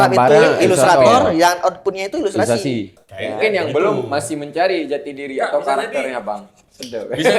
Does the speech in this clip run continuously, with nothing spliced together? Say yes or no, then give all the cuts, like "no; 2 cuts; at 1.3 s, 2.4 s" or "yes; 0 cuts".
no; 1 cut; at 3.0 s